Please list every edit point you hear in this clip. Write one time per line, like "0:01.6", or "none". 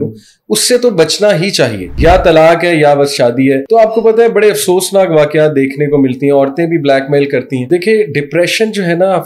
0:01.9
0:03.6
0:07.7